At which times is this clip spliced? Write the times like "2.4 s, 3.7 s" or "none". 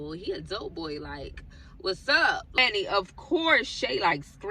2.6 s